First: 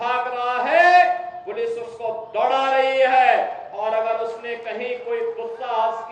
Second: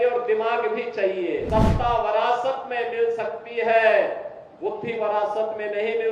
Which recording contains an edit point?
second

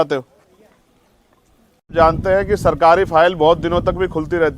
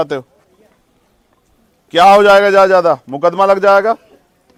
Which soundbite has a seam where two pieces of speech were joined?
first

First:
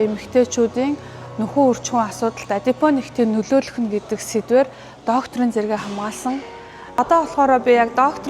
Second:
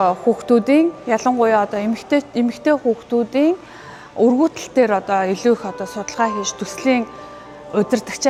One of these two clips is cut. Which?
first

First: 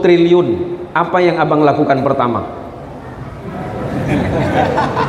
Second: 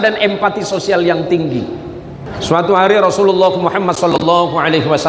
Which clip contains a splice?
second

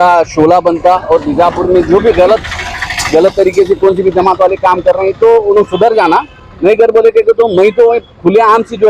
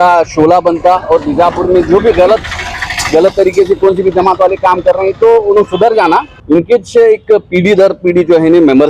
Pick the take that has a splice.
second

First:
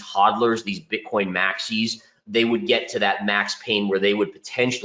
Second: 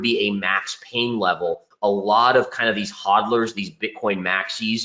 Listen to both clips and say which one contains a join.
second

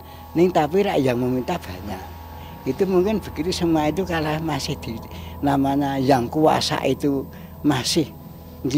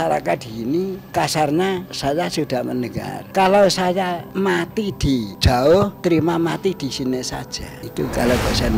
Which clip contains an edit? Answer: second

